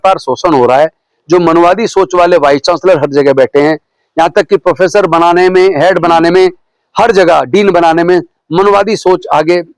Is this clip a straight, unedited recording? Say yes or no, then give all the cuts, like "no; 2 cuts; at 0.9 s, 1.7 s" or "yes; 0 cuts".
yes; 0 cuts